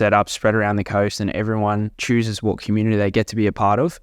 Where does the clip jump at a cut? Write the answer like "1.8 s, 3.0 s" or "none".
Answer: 1.9 s